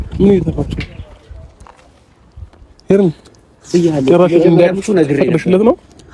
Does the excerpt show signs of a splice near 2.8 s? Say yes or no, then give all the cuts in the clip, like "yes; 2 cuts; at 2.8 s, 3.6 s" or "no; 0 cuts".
no; 0 cuts